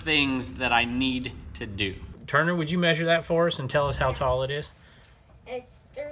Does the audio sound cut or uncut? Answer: cut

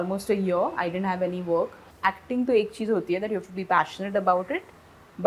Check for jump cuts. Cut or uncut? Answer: cut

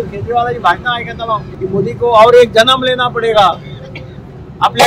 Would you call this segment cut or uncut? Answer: cut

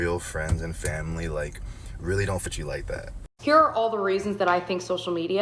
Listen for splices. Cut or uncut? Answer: cut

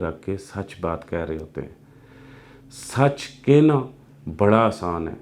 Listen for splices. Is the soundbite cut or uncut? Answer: uncut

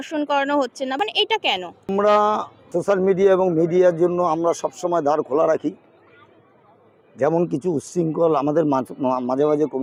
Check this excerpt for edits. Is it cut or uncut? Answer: uncut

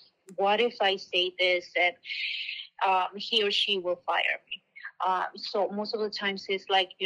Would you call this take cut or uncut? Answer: uncut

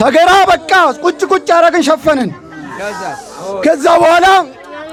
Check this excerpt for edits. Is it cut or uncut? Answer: uncut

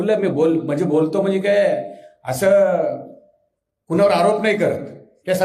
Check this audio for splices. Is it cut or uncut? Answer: uncut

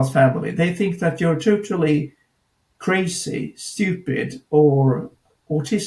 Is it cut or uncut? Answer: uncut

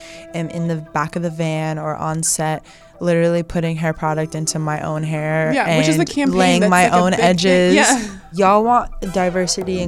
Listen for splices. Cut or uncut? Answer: cut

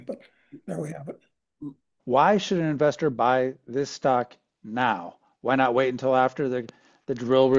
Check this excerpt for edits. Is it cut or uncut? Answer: cut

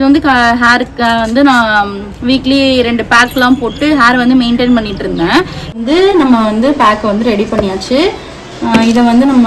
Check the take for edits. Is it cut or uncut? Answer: cut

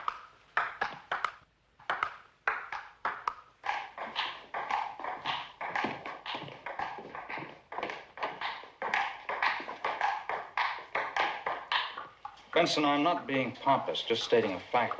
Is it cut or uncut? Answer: cut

